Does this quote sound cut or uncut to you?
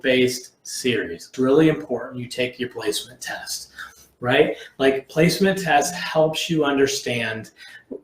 cut